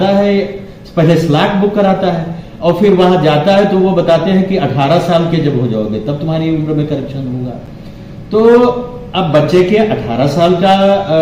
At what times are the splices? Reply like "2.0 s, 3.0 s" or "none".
none